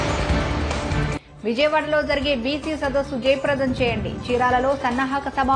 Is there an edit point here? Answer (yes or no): yes